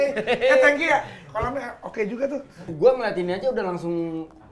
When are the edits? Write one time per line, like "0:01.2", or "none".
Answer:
0:02.7